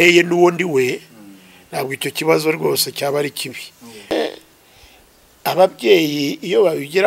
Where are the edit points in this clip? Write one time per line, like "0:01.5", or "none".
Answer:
0:04.1